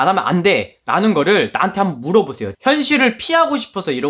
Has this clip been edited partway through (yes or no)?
yes